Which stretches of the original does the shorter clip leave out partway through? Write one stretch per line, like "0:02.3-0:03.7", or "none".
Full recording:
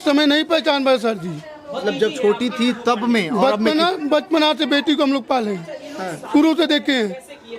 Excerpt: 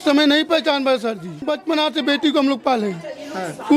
0:01.4-0:04.0